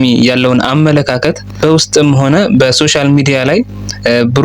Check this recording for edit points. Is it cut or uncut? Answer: cut